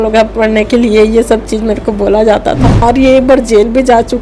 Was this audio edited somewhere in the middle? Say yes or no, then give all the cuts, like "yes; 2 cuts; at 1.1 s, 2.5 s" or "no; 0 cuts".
yes; 1 cut; at 2.8 s